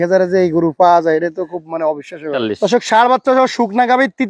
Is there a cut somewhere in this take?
yes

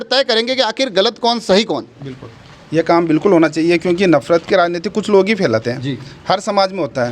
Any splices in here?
no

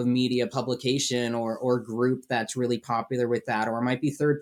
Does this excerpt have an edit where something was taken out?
no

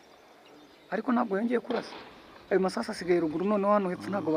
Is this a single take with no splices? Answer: yes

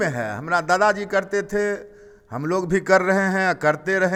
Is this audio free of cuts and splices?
yes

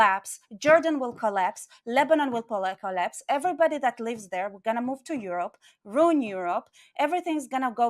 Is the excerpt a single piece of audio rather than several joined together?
yes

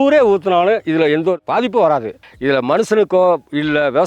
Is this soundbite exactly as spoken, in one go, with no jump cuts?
no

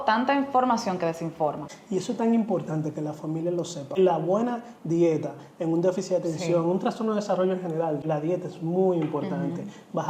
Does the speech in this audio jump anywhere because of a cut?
yes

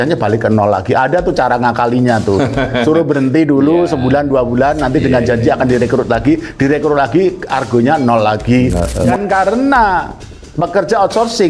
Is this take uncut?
no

